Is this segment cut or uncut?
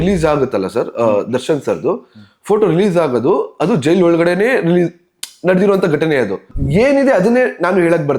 cut